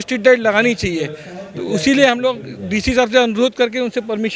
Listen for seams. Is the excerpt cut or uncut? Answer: uncut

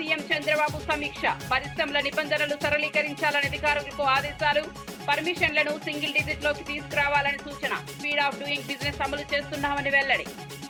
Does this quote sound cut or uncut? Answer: uncut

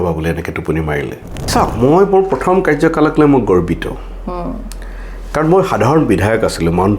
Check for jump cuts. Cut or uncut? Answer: cut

